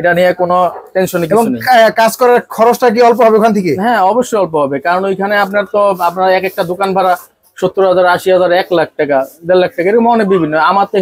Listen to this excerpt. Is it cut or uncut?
uncut